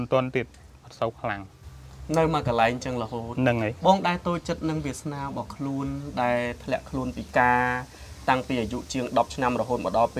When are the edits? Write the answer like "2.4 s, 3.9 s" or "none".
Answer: none